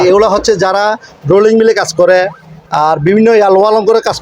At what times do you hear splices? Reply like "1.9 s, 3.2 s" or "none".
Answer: none